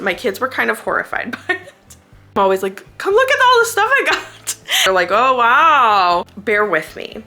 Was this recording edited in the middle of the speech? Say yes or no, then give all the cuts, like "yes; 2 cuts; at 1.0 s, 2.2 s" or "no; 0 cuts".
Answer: yes; 3 cuts; at 2.4 s, 4.7 s, 6.3 s